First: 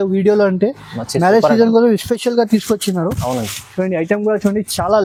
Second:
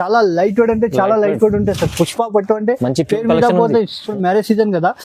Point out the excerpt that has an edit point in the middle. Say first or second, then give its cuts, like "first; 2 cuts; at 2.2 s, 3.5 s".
second; 1 cut; at 4.1 s